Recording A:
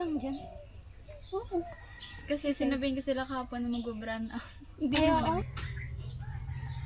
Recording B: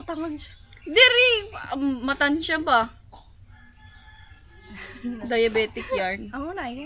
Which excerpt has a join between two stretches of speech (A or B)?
A